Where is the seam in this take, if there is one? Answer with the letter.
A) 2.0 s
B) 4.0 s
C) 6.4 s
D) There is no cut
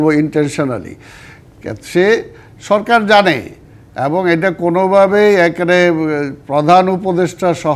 D